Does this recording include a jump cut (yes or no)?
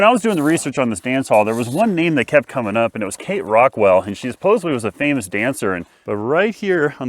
yes